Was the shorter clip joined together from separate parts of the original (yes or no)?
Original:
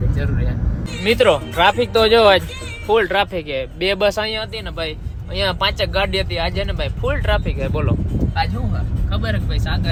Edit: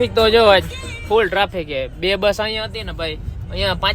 no